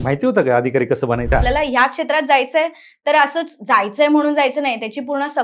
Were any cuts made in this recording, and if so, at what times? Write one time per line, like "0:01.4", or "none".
0:01.3